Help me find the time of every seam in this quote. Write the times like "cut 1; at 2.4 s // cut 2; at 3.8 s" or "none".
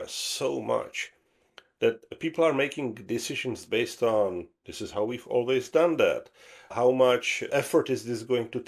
cut 1; at 2.0 s // cut 2; at 6.7 s // cut 3; at 7.5 s